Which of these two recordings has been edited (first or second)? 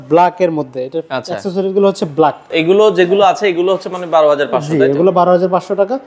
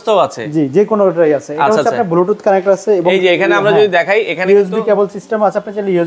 first